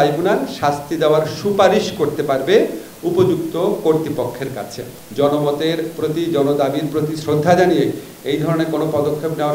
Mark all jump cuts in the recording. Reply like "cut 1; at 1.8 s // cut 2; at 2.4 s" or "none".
cut 1; at 5.0 s